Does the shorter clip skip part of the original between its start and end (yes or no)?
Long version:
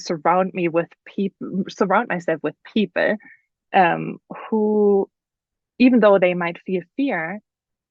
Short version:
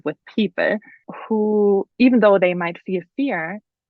yes